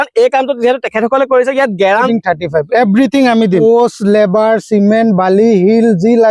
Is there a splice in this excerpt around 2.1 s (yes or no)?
yes